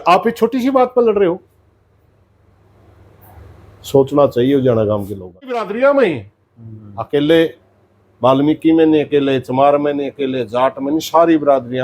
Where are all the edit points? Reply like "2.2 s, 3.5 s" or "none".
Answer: 5.7 s